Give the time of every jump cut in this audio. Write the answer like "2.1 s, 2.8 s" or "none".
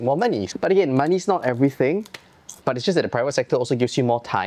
none